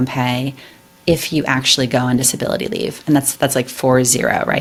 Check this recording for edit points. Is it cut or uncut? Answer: uncut